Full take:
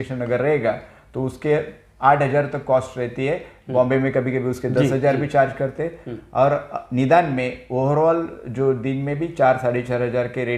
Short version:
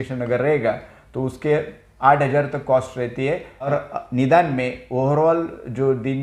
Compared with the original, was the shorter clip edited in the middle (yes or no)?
yes